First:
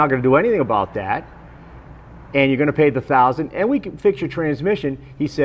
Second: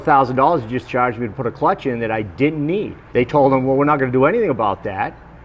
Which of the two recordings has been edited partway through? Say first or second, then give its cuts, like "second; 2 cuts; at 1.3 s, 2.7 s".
second; 1 cut; at 3.0 s